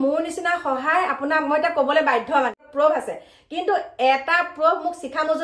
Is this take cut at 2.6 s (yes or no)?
yes